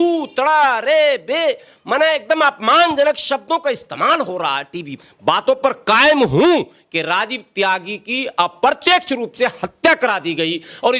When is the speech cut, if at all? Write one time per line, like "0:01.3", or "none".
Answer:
0:05.0